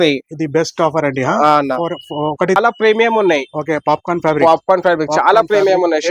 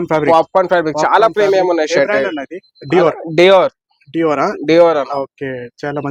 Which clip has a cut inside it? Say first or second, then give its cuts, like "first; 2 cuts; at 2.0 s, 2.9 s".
first; 1 cut; at 2.6 s